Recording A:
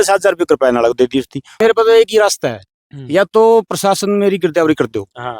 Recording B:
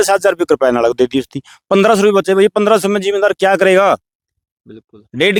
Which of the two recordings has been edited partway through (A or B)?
A